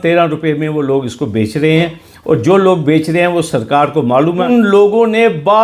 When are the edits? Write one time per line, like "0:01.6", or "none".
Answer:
0:04.4